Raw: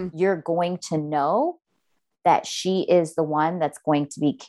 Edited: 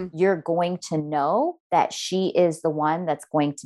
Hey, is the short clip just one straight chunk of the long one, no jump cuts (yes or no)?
no